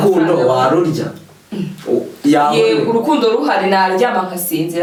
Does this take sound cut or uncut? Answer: uncut